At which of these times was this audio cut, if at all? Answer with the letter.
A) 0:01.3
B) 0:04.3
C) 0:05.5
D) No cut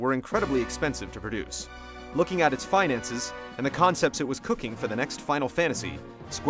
C